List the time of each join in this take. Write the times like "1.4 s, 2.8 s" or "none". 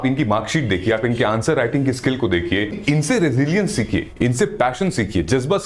2.8 s